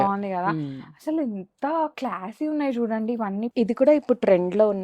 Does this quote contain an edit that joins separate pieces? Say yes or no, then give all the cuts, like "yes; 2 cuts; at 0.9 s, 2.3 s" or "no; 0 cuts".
yes; 1 cut; at 3.5 s